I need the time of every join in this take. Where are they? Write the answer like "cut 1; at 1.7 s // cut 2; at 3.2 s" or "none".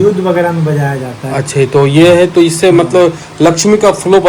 none